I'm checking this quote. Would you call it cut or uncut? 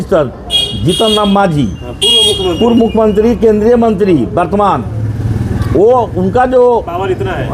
uncut